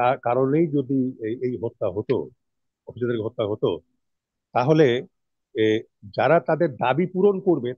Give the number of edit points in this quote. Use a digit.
0